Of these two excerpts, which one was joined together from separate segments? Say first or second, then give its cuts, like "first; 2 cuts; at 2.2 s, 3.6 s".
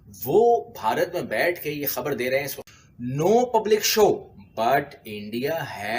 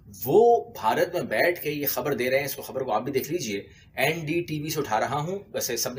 first; 1 cut; at 2.6 s